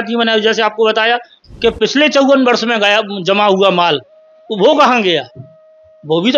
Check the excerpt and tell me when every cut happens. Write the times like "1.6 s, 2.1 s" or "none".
1.4 s